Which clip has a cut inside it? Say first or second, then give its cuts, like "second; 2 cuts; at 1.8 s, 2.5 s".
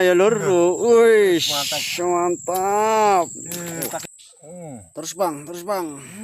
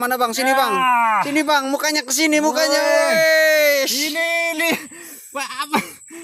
first; 1 cut; at 4.0 s